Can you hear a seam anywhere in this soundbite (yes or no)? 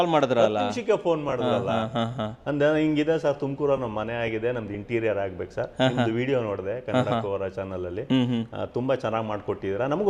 no